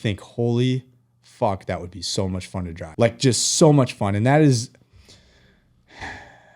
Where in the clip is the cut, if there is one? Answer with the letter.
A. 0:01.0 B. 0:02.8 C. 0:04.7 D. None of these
B